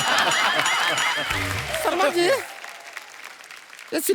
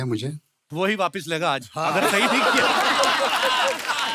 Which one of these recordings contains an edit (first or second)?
first